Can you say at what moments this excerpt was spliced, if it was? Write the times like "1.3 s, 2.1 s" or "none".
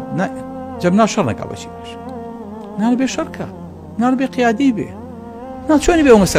none

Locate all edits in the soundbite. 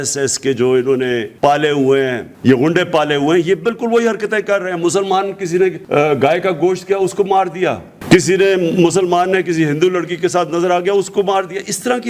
1.3 s, 2.3 s, 5.8 s

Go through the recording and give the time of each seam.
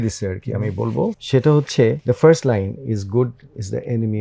1.2 s, 2.0 s

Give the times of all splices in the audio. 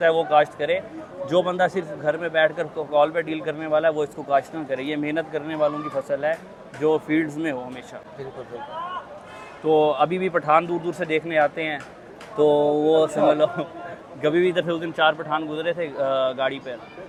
none

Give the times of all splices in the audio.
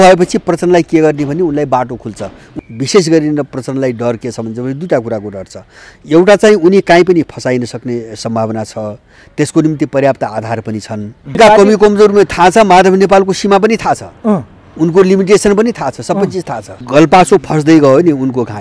2.5 s, 11.4 s, 16.8 s

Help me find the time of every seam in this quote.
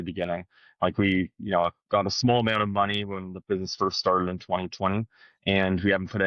none

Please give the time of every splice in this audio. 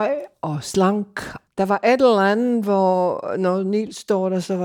1.4 s

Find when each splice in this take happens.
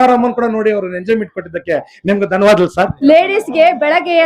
2.9 s

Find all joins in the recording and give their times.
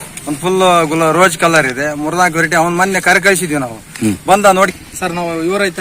4.7 s

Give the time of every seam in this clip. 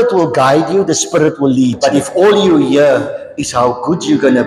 1.8 s

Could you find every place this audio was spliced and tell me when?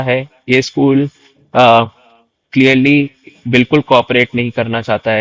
none

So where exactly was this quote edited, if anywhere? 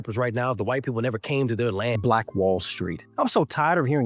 2.0 s

